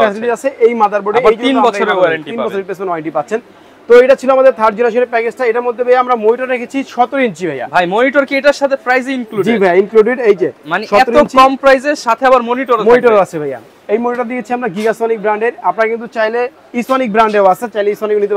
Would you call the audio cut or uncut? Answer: uncut